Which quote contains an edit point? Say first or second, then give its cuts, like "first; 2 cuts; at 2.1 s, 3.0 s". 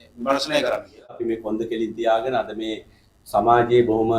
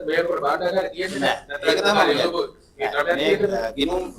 first; 1 cut; at 1.2 s